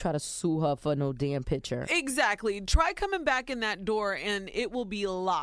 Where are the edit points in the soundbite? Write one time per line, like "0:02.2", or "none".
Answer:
none